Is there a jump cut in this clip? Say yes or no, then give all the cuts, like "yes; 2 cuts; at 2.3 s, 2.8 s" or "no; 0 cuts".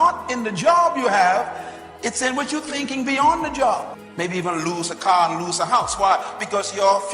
yes; 1 cut; at 4.0 s